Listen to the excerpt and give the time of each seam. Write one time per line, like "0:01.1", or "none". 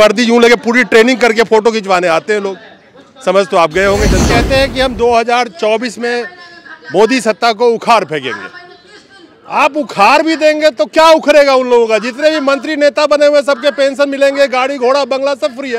0:04.2